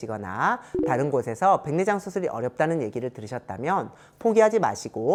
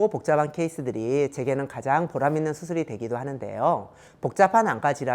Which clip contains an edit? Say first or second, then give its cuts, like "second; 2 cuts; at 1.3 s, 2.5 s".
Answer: second; 1 cut; at 4.0 s